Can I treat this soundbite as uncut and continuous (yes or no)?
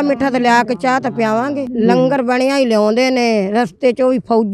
no